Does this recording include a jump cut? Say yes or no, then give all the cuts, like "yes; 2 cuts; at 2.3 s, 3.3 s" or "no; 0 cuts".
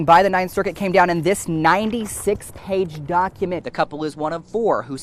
no; 0 cuts